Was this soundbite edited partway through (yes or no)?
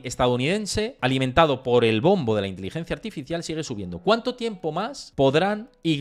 yes